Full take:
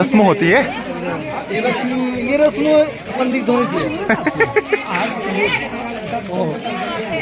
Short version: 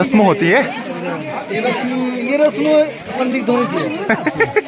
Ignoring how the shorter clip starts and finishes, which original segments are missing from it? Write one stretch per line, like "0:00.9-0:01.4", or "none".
none